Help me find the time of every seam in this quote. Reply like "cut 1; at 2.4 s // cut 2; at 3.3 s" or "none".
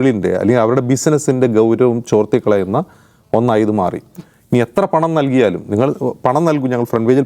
none